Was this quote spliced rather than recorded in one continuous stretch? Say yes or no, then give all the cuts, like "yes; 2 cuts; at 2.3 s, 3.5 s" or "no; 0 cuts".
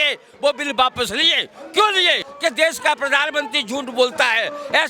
yes; 1 cut; at 2.3 s